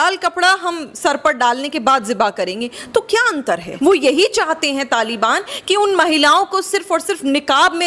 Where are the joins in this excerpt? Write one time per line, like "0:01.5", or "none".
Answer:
0:03.7